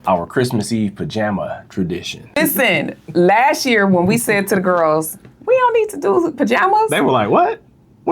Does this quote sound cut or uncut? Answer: cut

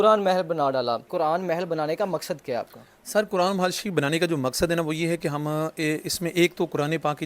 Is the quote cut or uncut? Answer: cut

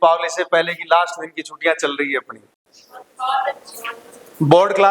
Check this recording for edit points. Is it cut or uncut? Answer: uncut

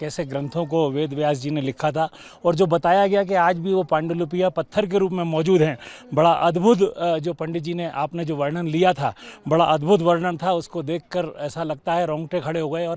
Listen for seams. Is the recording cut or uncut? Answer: uncut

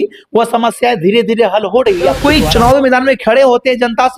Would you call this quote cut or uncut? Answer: cut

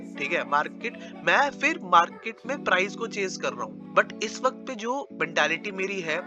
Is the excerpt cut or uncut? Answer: cut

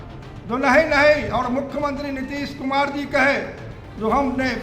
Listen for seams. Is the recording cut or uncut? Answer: uncut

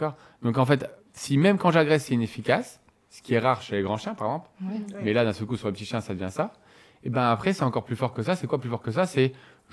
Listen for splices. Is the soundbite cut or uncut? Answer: uncut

